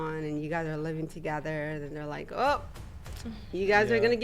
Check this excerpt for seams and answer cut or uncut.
uncut